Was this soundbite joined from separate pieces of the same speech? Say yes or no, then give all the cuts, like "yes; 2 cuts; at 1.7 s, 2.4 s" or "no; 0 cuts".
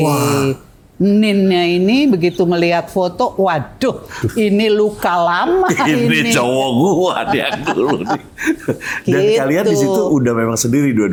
no; 0 cuts